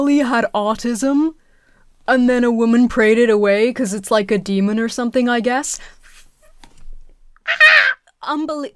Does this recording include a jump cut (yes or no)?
no